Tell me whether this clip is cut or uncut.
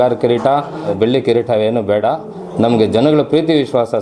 cut